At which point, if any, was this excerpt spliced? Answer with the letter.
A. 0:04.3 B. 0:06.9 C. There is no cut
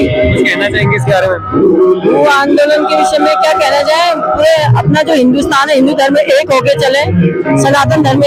C